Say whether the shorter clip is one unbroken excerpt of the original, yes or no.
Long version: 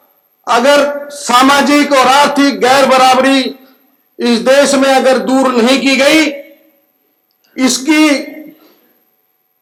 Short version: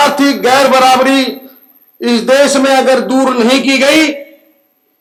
yes